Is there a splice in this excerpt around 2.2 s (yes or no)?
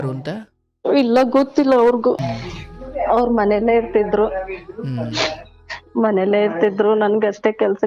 yes